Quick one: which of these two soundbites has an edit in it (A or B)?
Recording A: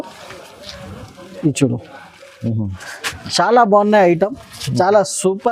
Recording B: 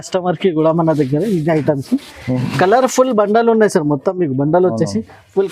B